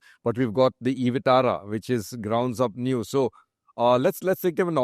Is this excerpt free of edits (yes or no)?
yes